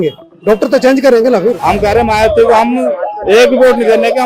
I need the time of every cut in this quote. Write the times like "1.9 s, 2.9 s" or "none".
1.6 s